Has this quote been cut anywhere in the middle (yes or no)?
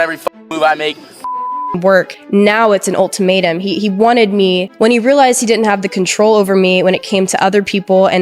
yes